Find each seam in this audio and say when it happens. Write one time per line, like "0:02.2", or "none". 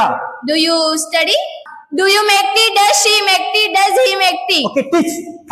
0:01.7

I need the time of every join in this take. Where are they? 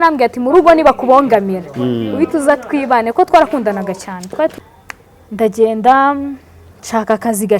0:04.5

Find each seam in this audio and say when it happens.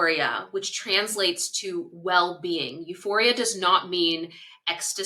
none

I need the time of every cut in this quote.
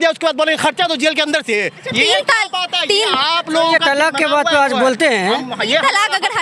0:01.8

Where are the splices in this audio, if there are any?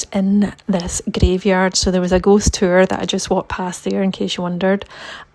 none

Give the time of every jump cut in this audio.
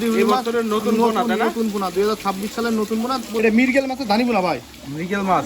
0:03.4

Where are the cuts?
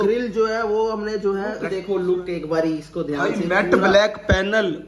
0:01.7

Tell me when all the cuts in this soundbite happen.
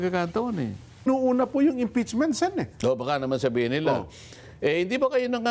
0:01.1

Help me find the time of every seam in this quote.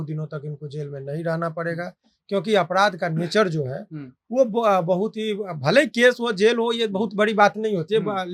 none

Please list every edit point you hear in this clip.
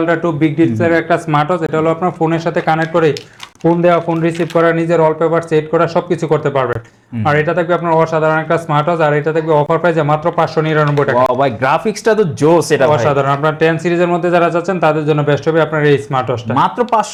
none

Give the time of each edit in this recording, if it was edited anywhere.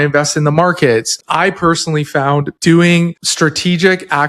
0:01.2
0:02.5
0:03.2

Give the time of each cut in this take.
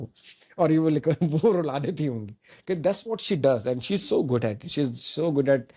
none

